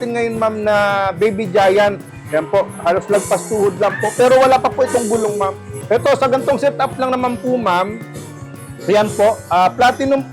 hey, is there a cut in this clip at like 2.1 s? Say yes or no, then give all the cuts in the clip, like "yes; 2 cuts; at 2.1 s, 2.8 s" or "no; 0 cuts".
yes; 2 cuts; at 2.1 s, 5.8 s